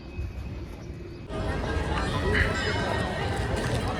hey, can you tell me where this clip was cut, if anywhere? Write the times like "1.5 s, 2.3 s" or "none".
1.4 s